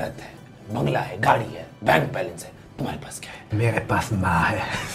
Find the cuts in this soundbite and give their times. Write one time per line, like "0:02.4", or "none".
0:03.4

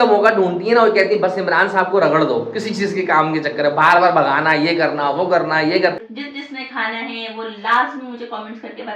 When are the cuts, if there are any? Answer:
0:06.0

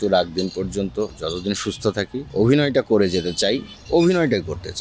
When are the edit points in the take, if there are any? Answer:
0:01.1
0:02.3
0:03.7

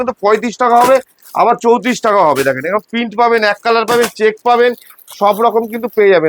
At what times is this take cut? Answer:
none

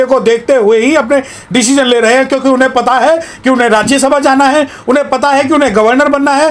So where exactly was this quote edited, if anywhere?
none

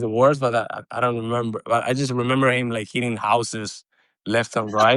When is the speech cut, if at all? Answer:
none

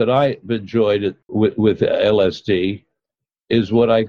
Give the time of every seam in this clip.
0:01.2

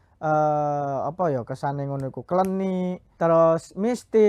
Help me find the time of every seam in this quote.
0:03.0

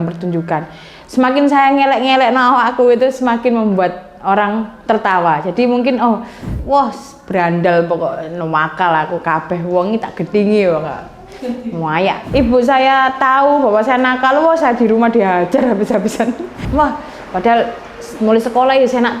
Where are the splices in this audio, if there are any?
0:06.5
0:12.2
0:16.6

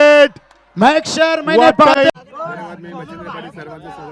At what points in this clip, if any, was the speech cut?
0:02.1

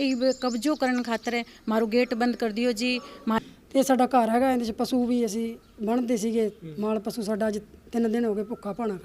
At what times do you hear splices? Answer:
0:03.4

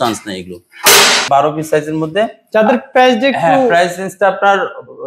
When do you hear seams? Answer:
0:01.2

